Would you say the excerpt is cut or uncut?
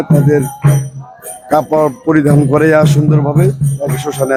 uncut